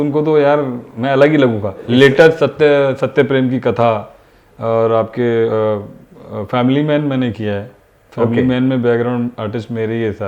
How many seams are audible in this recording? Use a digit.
1